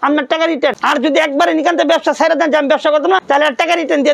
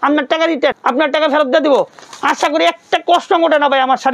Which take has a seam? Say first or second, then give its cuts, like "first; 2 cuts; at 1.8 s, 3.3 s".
first; 2 cuts; at 0.8 s, 3.2 s